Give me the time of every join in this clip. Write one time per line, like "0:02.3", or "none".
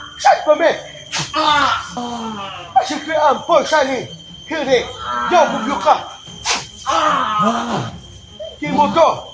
0:02.0
0:07.4